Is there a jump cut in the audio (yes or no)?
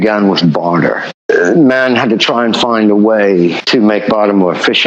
yes